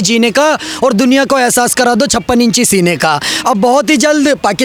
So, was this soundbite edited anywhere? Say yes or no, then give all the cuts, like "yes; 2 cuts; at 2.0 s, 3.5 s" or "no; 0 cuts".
no; 0 cuts